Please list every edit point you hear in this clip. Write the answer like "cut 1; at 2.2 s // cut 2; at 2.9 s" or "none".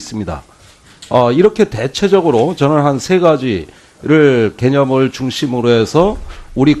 cut 1; at 4.1 s